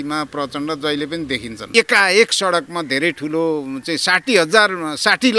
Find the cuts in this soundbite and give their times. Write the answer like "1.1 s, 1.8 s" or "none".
1.6 s

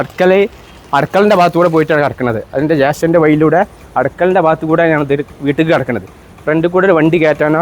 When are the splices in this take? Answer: none

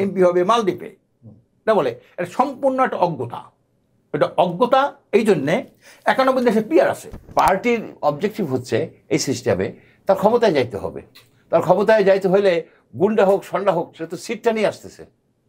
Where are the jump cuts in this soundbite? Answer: 7.3 s

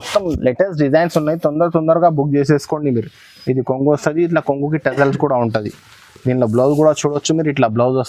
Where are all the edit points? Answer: none

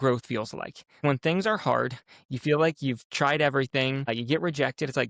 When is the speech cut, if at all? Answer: 1.0 s, 4.1 s

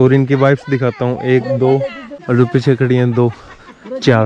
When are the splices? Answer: 2.1 s

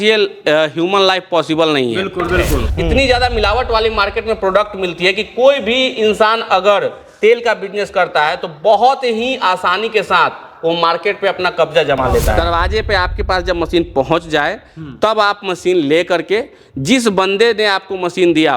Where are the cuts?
2.6 s, 12.4 s

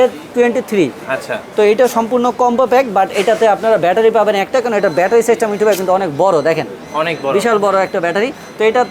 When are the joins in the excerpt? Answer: none

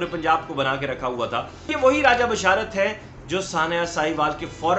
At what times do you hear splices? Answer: 1.7 s

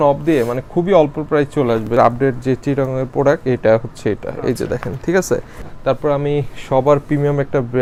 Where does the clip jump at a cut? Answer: none

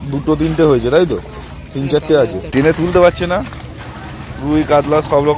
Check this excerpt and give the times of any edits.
2.4 s

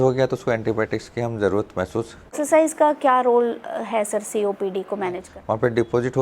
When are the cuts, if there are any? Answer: 2.3 s, 5.3 s

